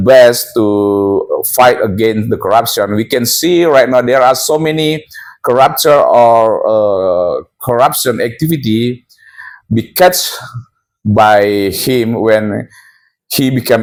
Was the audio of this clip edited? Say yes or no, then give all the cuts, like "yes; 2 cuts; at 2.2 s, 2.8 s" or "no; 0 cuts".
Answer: no; 0 cuts